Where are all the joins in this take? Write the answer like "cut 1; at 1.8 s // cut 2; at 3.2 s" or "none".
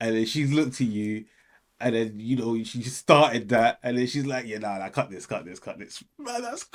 none